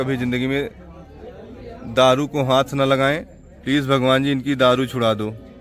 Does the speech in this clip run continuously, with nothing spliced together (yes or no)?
yes